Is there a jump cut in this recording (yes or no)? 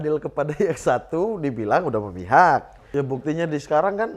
yes